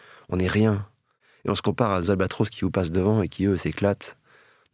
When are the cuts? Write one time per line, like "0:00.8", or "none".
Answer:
none